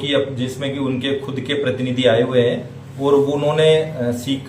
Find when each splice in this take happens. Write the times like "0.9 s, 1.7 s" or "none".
none